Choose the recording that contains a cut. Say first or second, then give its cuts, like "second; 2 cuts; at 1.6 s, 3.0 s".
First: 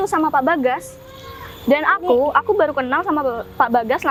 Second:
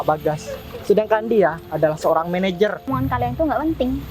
second; 1 cut; at 2.8 s